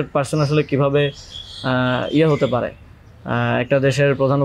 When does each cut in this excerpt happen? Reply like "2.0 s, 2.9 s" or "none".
none